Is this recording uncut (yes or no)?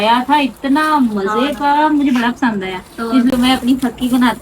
no